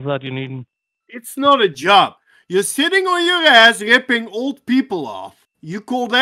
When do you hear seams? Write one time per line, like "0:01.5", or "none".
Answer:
0:01.0